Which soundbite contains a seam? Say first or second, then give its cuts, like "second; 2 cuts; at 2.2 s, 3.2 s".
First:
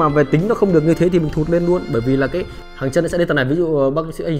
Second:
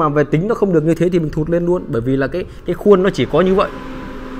first; 1 cut; at 2.5 s